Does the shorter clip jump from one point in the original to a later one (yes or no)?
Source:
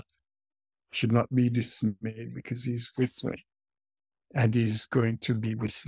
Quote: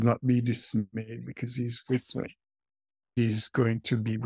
yes